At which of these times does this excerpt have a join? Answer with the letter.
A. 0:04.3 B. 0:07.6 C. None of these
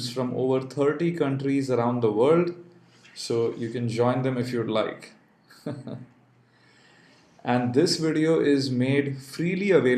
B